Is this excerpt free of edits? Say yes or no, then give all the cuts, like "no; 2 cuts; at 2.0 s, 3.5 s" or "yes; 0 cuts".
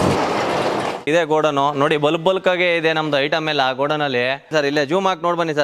no; 2 cuts; at 1.0 s, 4.5 s